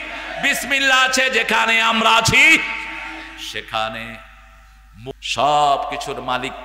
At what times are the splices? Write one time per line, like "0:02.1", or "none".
0:05.1